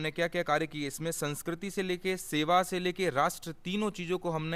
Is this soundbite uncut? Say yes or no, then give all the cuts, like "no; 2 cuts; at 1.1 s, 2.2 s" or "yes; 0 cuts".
yes; 0 cuts